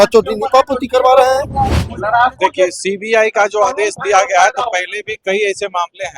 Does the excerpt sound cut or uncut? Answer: cut